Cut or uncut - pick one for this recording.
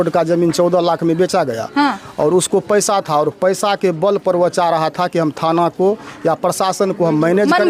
uncut